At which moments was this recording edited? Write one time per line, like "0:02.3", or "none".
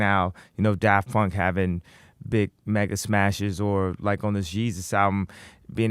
0:02.8